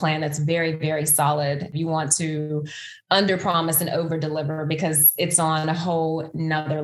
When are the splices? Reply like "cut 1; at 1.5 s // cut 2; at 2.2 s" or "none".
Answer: cut 1; at 1.7 s